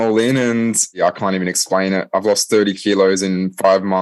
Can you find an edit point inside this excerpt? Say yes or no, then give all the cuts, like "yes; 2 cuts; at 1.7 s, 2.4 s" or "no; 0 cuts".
yes; 1 cut; at 1.0 s